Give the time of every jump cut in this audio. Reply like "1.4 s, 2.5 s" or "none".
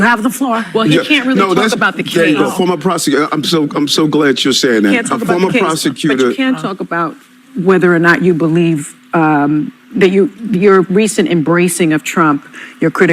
1.8 s